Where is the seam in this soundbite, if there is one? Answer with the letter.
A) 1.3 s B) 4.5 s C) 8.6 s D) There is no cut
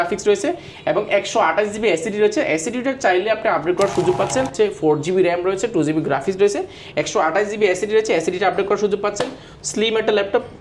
B